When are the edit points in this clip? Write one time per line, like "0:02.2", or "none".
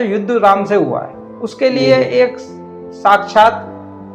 none